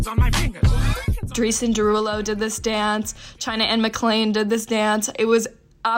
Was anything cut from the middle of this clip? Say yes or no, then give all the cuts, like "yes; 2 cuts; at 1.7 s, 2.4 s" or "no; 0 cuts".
yes; 1 cut; at 1.0 s